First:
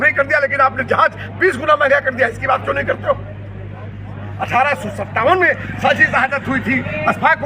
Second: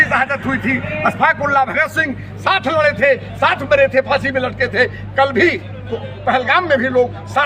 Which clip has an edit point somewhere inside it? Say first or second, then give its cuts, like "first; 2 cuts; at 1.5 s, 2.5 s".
first; 1 cut; at 4.2 s